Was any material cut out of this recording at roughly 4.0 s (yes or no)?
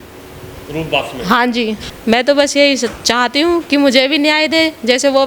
no